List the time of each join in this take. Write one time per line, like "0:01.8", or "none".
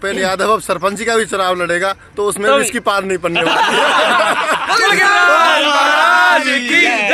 none

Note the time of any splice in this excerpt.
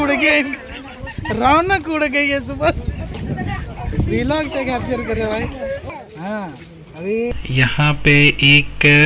0:05.9
0:07.3

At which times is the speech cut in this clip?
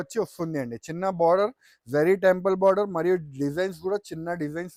none

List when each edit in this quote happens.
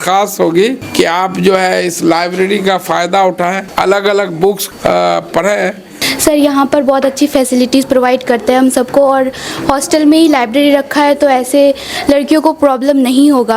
0:00.8
0:03.6
0:04.7
0:06.0

